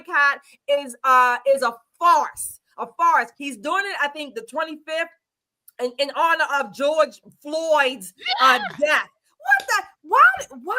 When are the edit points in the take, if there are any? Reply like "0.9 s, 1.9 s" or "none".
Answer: 3.4 s